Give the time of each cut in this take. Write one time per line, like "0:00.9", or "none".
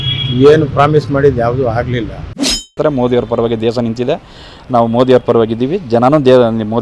0:02.7